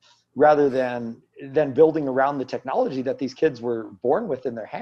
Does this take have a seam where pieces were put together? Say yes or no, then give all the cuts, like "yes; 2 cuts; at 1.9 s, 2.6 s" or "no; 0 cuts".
no; 0 cuts